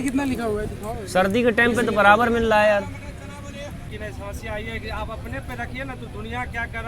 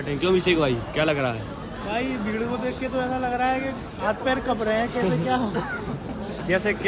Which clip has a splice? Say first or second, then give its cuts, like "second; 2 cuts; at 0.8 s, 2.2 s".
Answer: first; 1 cut; at 3.9 s